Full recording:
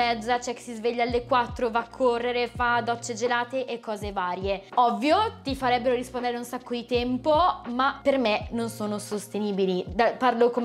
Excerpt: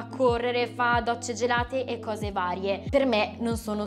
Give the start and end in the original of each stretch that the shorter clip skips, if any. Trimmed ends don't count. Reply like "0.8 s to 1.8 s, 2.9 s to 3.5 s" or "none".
4.6 s to 8.0 s